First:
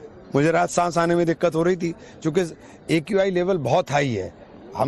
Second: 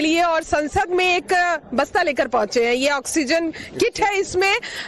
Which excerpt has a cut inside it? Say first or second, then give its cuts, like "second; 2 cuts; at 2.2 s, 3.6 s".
second; 1 cut; at 1.1 s